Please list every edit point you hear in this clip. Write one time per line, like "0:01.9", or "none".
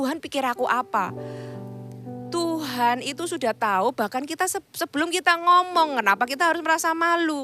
none